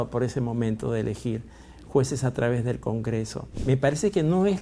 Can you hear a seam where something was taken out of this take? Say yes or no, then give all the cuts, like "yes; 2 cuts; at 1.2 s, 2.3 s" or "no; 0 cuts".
yes; 1 cut; at 3.6 s